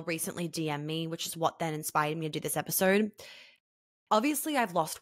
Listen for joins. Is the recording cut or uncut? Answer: uncut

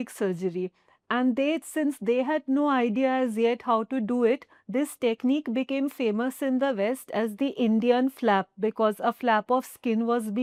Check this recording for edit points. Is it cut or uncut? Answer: uncut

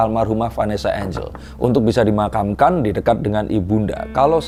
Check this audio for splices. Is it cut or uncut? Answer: uncut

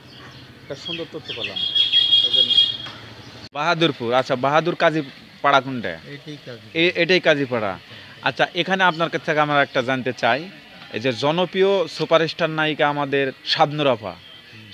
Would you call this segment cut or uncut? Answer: uncut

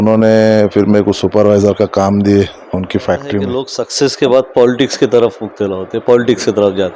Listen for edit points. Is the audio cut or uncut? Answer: cut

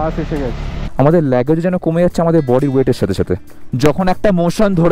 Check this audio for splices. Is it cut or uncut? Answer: cut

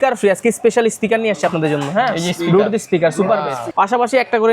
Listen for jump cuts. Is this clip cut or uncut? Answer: cut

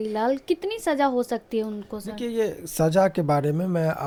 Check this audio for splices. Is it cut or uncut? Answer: uncut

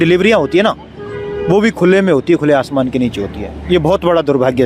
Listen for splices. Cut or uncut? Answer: uncut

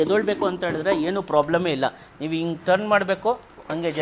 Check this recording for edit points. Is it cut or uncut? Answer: uncut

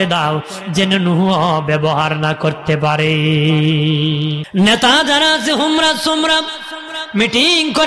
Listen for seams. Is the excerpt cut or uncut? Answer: cut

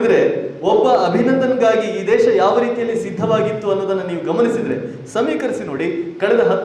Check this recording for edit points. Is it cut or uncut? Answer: uncut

